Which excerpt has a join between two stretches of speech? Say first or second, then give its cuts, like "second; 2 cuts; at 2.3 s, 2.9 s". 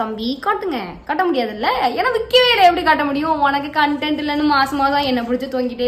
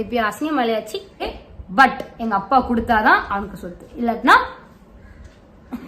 second; 1 cut; at 1.2 s